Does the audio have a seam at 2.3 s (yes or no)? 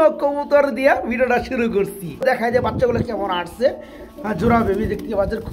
yes